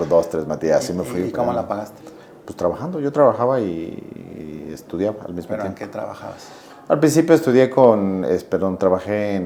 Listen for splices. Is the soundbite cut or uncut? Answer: uncut